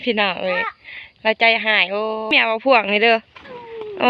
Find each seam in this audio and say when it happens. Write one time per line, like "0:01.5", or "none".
0:02.3